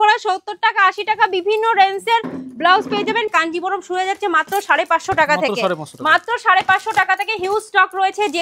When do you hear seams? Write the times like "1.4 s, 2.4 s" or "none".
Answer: 3.3 s